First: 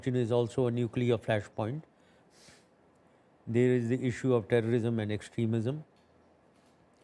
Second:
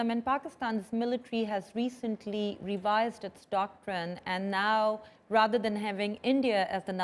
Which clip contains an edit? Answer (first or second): first